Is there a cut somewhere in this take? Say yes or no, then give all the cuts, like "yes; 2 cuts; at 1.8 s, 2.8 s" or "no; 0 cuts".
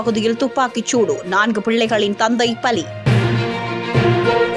no; 0 cuts